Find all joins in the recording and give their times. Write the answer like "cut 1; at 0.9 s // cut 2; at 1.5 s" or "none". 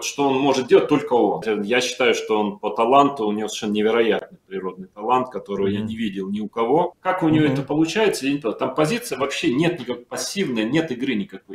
cut 1; at 1.4 s // cut 2; at 7.0 s